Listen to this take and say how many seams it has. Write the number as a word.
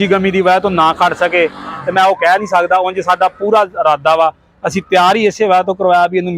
zero